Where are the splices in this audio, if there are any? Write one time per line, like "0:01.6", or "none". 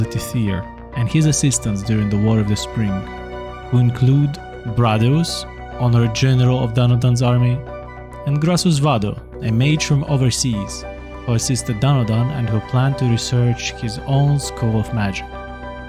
none